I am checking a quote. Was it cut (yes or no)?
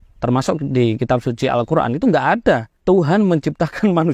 yes